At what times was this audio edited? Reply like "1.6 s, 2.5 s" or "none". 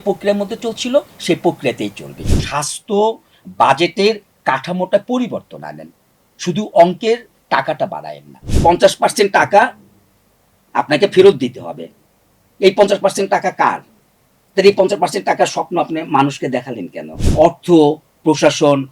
2.4 s, 8.6 s, 17.3 s